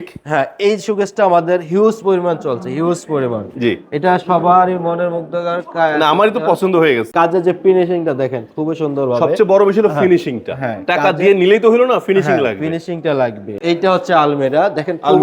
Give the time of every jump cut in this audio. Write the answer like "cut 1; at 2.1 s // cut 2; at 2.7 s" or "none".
cut 1; at 7.1 s // cut 2; at 13.5 s